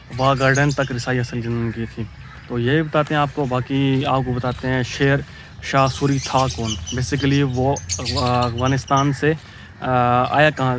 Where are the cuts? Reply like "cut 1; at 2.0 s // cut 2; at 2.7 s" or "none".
none